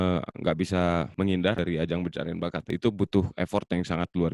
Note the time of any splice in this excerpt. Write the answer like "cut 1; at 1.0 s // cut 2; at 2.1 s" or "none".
cut 1; at 1.6 s // cut 2; at 2.7 s